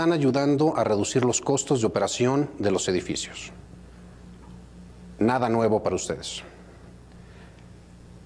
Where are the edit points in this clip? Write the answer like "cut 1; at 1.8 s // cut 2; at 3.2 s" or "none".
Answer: none